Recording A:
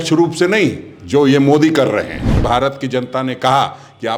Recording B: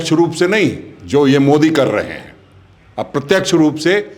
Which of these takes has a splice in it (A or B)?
A